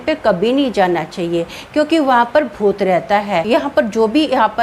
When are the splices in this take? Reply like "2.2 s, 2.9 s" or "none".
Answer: 3.4 s